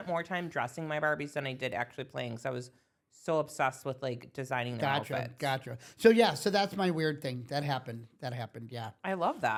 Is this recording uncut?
yes; 0 cuts

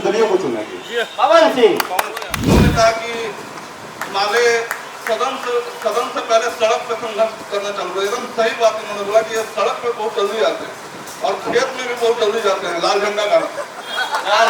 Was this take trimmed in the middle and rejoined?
yes; 1 cut; at 2.3 s

